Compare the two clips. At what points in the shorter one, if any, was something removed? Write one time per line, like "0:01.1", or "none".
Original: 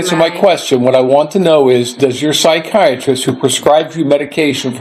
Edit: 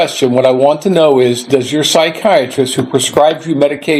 none